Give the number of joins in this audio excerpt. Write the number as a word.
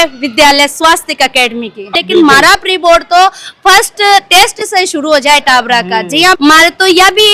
two